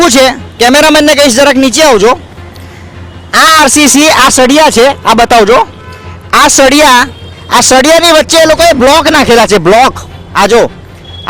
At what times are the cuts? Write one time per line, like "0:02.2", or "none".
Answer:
none